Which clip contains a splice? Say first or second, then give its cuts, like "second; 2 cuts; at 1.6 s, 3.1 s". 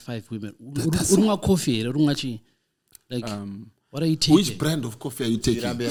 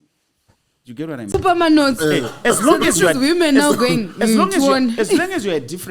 second; 1 cut; at 1.3 s